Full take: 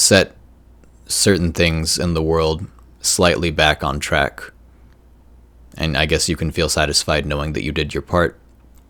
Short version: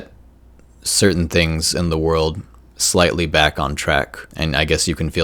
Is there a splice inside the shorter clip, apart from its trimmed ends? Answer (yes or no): yes